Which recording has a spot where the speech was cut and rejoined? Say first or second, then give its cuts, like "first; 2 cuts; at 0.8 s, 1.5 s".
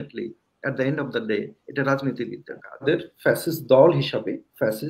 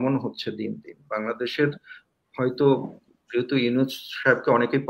first; 1 cut; at 2.8 s